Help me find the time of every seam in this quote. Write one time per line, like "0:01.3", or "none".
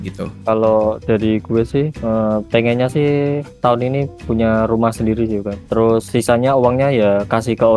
none